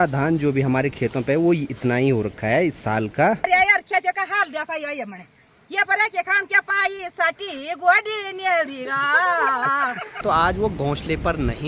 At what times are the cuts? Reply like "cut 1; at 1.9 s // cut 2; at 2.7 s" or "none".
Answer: cut 1; at 3.5 s // cut 2; at 10.2 s